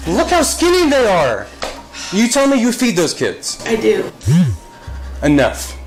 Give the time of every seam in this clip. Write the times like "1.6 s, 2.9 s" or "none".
none